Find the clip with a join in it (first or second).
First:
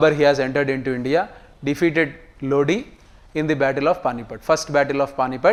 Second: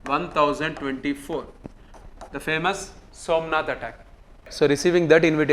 second